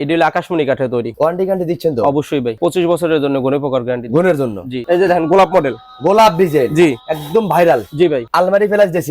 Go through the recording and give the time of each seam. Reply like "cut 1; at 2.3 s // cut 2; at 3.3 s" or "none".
cut 1; at 1.1 s // cut 2; at 2.6 s // cut 3; at 4.8 s // cut 4; at 8.3 s